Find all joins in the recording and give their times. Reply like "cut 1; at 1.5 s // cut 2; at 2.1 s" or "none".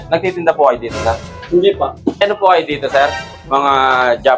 cut 1; at 1.3 s // cut 2; at 2.2 s